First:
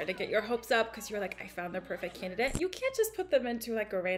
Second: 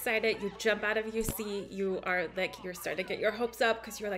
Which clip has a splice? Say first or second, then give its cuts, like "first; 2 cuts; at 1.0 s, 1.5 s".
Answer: first; 1 cut; at 2.5 s